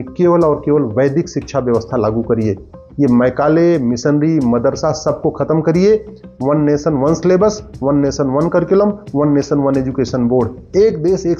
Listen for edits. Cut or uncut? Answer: uncut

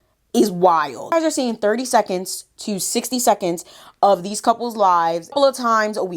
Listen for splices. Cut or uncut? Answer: cut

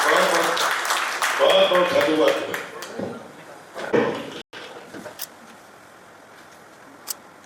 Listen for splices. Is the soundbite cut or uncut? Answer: uncut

